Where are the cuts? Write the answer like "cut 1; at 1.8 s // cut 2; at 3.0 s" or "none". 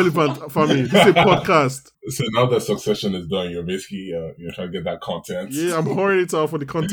cut 1; at 1.9 s